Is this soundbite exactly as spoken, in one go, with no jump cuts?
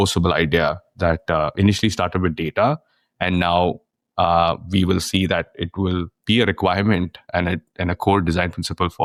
yes; 0 cuts

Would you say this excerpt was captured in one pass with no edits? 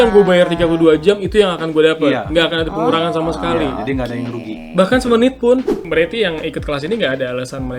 no; 1 cut; at 5.8 s

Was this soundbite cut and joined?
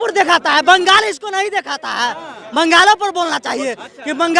no; 0 cuts

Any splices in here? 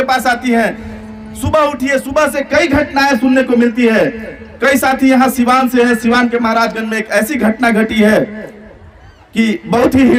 no; 0 cuts

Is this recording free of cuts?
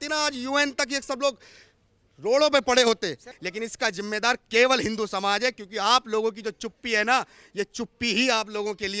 no; 1 cut; at 3.3 s

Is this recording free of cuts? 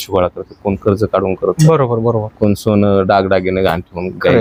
yes; 0 cuts

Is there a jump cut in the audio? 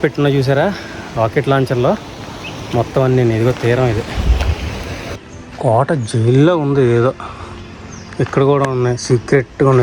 yes; 1 cut; at 5.2 s

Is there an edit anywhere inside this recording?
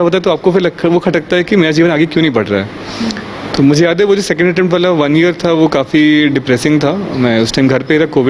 no; 0 cuts

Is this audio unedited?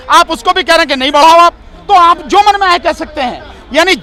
yes; 0 cuts

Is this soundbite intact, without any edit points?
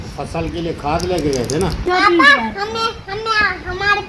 no; 1 cut; at 1.8 s

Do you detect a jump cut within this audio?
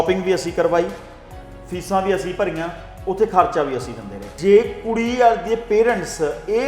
yes; 1 cut; at 4.3 s

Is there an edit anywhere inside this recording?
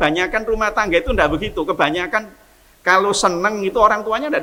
no; 0 cuts

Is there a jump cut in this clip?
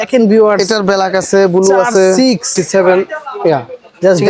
yes; 1 cut; at 2.5 s

